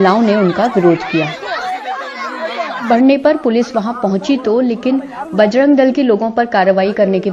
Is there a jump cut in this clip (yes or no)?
yes